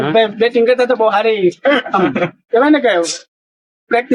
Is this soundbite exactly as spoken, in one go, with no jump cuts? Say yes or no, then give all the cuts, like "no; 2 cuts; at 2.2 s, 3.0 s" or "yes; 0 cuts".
yes; 0 cuts